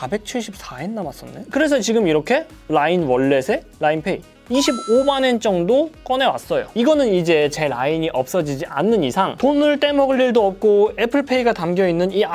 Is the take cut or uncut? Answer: cut